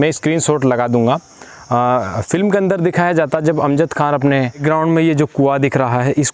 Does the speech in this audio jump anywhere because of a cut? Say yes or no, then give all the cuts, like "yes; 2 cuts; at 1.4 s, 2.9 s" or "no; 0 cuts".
yes; 1 cut; at 4.6 s